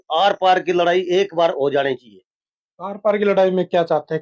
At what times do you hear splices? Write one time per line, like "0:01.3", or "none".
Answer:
none